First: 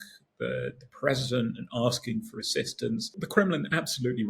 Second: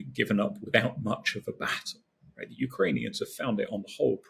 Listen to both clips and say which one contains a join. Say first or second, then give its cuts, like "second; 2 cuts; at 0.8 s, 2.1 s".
first; 1 cut; at 3.2 s